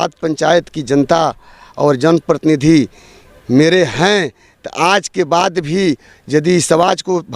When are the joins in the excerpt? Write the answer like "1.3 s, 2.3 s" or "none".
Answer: none